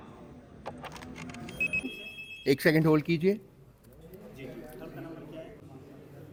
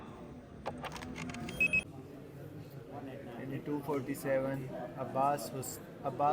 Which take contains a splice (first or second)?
second